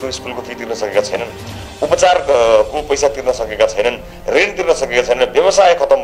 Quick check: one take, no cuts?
yes; 0 cuts

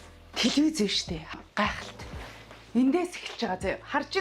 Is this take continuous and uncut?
no; 1 cut; at 1.3 s

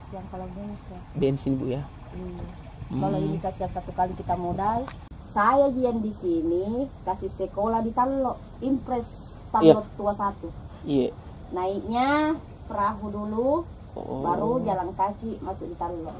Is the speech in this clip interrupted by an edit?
yes; 1 cut; at 5.0 s

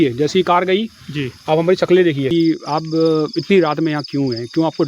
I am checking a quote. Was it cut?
yes; 1 cut; at 2.3 s

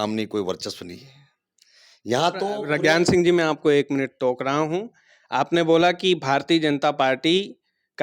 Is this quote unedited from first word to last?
yes; 0 cuts

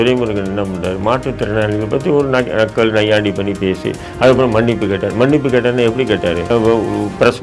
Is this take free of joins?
no; 1 cut; at 6.5 s

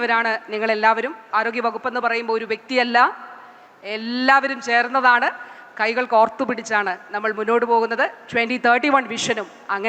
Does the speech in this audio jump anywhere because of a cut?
yes; 1 cut; at 1.2 s

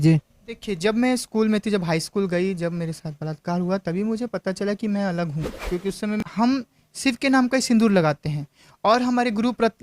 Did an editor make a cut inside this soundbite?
yes; 1 cut; at 6.2 s

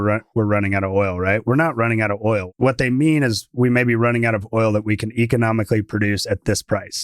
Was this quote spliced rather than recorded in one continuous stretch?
yes; 1 cut; at 2.5 s

